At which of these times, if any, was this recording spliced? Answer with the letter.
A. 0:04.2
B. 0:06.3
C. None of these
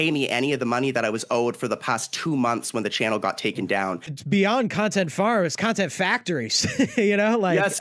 A